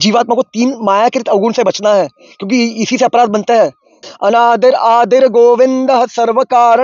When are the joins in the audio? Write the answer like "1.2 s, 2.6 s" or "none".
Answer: 4.0 s